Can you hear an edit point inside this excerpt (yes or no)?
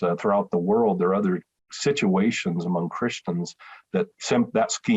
no